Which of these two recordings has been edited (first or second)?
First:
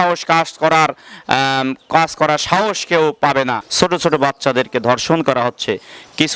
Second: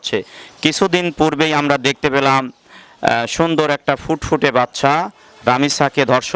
first